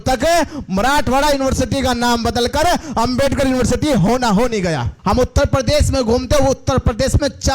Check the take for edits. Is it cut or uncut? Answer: cut